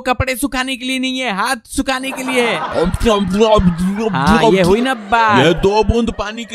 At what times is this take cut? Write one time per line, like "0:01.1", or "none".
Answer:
0:02.7